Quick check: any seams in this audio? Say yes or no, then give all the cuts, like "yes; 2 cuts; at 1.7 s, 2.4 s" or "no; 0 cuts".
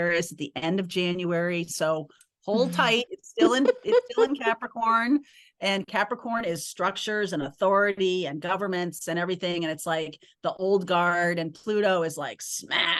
no; 0 cuts